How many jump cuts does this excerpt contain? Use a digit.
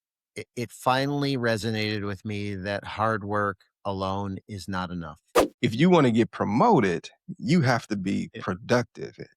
1